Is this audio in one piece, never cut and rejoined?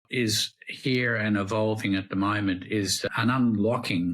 no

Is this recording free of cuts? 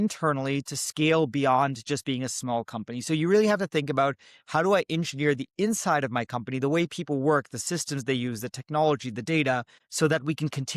no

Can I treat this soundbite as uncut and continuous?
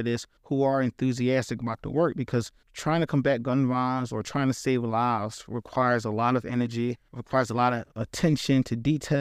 yes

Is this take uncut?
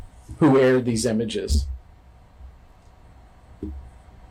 yes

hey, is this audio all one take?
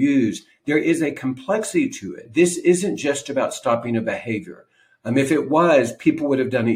no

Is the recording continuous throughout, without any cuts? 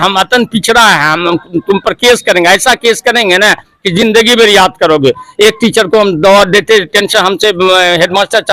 yes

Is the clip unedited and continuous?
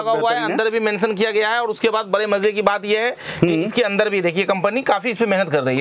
yes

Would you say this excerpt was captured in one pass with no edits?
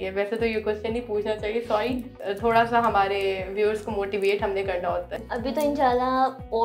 no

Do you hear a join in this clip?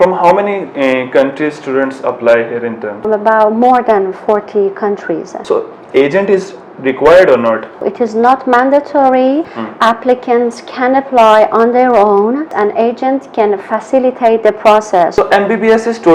yes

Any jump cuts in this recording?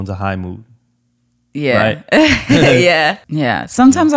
yes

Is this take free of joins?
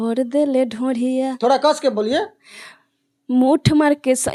yes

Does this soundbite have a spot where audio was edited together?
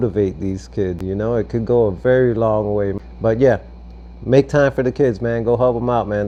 no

